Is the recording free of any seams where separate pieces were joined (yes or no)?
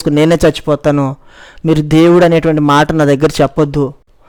yes